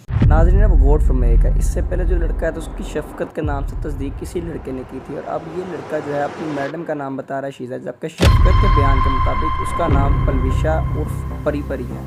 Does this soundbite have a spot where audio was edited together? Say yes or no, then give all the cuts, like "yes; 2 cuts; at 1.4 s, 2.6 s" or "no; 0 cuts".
no; 0 cuts